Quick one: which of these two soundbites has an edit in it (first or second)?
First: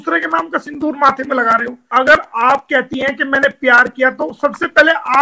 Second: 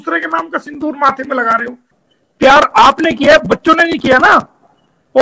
first